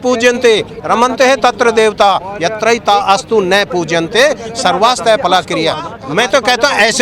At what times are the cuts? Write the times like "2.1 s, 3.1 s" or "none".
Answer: 6.0 s